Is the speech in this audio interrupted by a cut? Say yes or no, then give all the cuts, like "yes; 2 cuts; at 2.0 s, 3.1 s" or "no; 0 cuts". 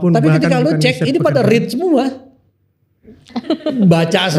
no; 0 cuts